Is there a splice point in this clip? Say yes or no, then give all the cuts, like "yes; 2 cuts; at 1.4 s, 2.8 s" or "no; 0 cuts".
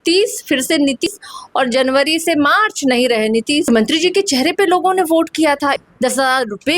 yes; 3 cuts; at 1.1 s, 3.6 s, 5.8 s